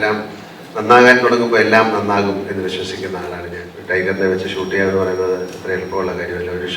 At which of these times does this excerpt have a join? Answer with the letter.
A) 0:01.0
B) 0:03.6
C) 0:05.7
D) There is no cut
B